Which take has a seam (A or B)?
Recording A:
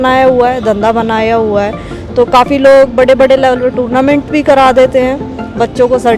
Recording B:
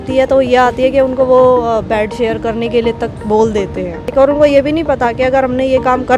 B